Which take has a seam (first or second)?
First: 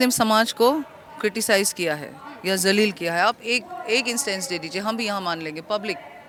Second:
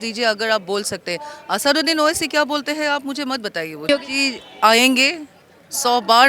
second